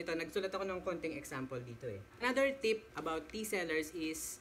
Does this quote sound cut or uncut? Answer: cut